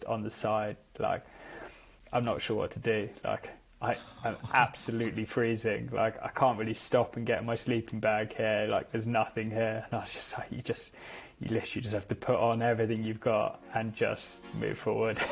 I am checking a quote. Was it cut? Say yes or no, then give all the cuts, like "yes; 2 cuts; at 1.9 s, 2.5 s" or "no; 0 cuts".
no; 0 cuts